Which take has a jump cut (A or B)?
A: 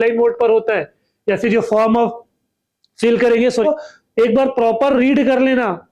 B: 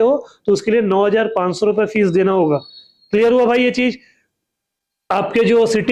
A